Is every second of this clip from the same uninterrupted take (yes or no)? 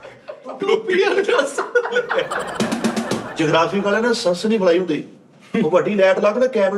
no